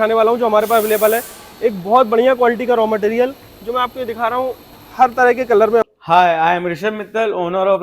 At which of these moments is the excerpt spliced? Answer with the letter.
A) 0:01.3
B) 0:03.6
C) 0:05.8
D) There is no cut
C